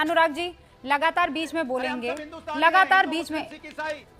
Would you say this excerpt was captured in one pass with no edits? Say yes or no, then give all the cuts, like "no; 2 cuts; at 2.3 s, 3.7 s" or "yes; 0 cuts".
yes; 0 cuts